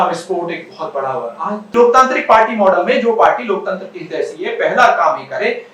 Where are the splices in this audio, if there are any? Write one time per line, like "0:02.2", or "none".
0:01.7